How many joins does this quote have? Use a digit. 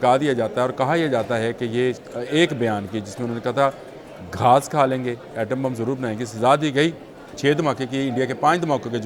2